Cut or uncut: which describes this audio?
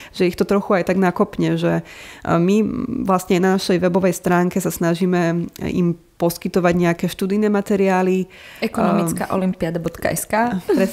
uncut